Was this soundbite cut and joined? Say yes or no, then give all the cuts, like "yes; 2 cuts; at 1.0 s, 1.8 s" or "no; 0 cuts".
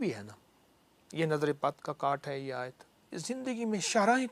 yes; 1 cut; at 3.1 s